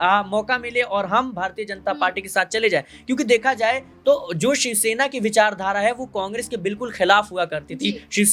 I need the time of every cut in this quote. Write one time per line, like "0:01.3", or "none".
none